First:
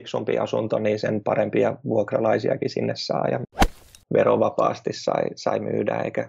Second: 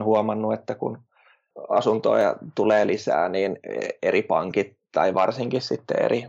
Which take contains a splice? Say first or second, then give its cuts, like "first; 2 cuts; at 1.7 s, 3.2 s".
first; 1 cut; at 3.5 s